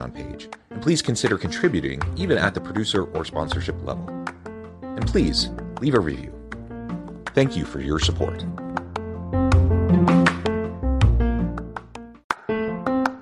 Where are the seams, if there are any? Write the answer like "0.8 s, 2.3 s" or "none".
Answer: 12.1 s